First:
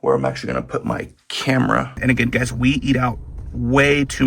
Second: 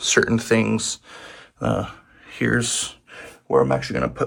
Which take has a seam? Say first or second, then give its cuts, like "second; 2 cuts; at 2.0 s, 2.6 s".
first; 1 cut; at 2.0 s